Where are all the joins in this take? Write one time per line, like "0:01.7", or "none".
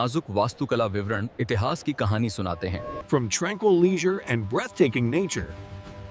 none